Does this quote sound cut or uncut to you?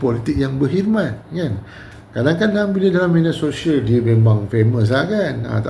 uncut